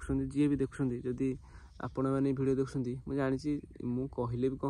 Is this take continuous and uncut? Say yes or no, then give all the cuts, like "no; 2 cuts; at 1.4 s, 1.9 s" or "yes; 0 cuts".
yes; 0 cuts